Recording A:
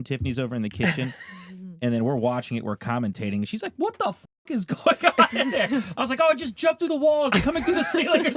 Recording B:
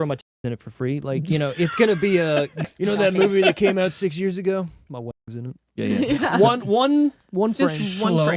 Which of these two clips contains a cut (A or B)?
B